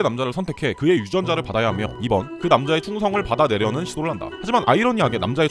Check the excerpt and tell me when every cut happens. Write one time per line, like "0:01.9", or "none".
0:01.9